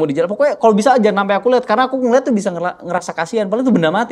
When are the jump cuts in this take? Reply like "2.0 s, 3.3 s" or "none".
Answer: none